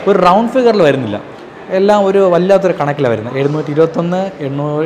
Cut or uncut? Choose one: uncut